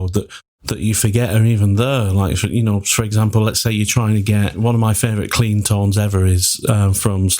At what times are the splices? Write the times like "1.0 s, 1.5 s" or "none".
4.6 s